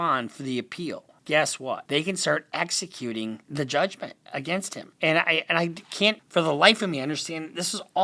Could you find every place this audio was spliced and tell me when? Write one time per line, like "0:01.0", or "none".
0:01.1
0:01.8
0:03.4
0:04.8
0:06.2